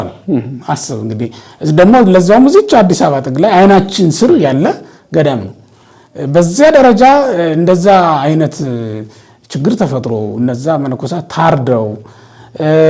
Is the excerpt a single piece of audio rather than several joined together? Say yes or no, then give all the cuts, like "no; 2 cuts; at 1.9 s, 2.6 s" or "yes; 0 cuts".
yes; 0 cuts